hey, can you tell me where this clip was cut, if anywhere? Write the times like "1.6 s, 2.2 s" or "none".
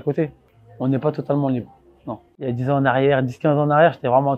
2.4 s